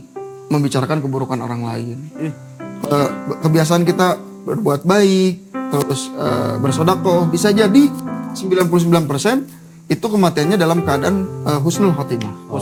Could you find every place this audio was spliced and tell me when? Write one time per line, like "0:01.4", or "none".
none